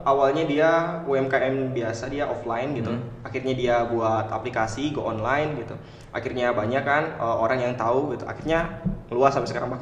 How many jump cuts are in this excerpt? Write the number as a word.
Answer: zero